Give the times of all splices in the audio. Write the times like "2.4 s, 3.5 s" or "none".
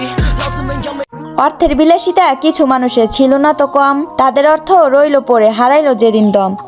1.1 s